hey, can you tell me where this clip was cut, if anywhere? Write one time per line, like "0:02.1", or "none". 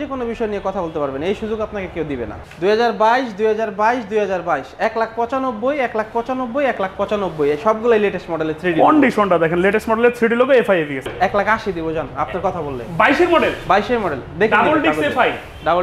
0:02.4
0:11.1